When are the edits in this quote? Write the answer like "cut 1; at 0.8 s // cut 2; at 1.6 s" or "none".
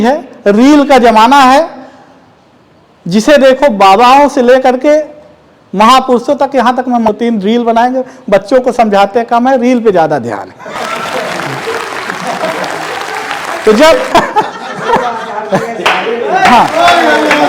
cut 1; at 7.1 s // cut 2; at 14.1 s